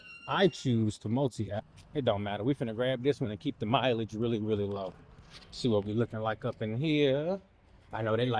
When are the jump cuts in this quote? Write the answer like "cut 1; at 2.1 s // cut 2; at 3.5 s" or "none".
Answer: cut 1; at 1.7 s